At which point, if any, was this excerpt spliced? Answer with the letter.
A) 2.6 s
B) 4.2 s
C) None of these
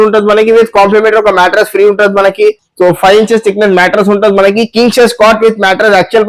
C